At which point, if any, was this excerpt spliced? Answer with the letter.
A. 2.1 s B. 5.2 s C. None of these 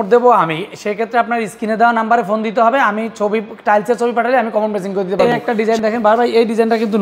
B